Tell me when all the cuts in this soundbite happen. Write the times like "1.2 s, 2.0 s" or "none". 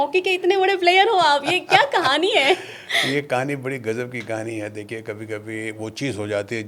none